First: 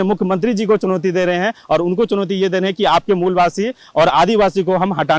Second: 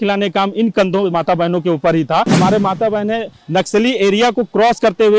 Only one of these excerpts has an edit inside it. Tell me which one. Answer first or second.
second